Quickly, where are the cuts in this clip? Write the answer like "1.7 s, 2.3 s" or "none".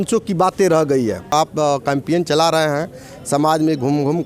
1.3 s

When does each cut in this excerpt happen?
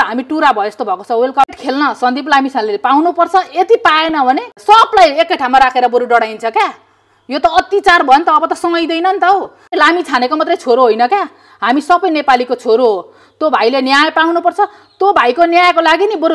1.5 s, 4.5 s, 9.7 s

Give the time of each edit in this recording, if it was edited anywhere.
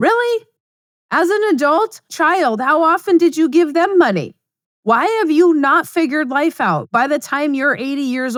none

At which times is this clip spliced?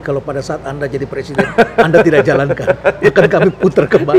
none

